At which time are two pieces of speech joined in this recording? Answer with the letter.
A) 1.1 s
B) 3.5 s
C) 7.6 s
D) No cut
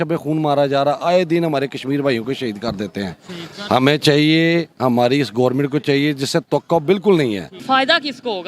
C